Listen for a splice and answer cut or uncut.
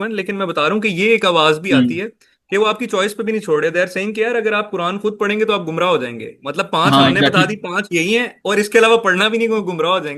uncut